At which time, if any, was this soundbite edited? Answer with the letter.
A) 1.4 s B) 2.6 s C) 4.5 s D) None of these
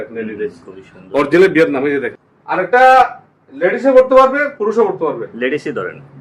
B